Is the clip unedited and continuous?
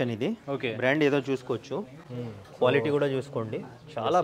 yes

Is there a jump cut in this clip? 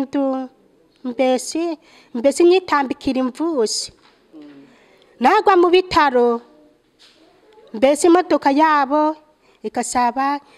no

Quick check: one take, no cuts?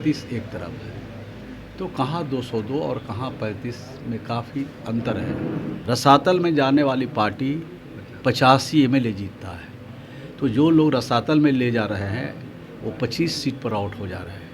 no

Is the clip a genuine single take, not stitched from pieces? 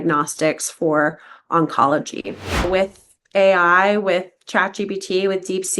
no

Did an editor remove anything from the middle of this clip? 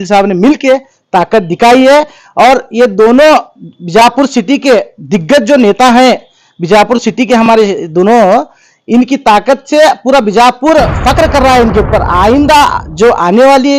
no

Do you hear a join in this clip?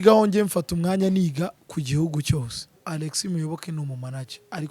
yes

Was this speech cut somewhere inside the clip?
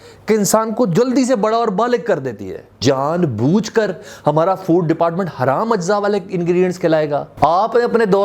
yes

